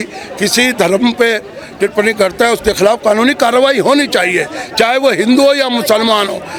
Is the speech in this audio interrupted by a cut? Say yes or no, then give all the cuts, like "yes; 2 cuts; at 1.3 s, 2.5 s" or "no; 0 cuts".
no; 0 cuts